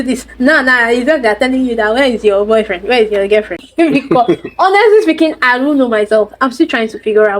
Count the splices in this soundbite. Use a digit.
1